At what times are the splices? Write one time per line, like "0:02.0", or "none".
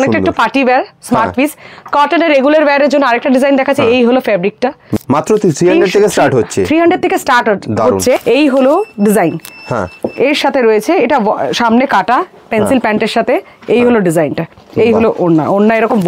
0:04.9
0:08.2